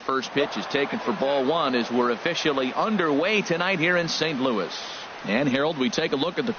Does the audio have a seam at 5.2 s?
no; 0 cuts

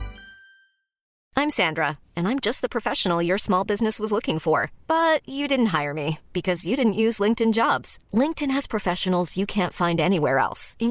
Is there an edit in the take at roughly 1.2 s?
yes; 1 cut; at 1.2 s

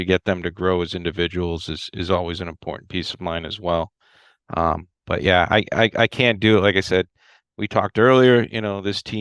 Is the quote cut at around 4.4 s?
no; 0 cuts

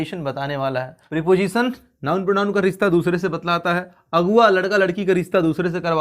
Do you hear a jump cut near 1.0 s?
yes; 1 cut; at 1.0 s

